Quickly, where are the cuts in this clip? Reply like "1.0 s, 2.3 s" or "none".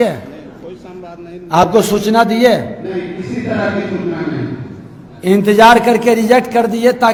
none